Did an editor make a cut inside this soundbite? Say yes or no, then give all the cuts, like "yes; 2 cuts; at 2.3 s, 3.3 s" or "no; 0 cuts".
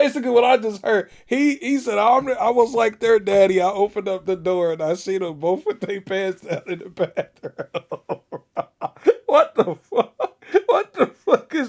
no; 0 cuts